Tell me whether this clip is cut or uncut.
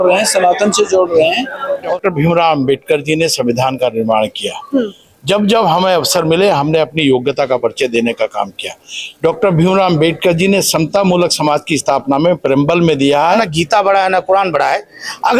cut